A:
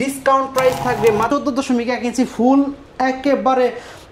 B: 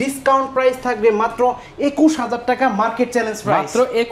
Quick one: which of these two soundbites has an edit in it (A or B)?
A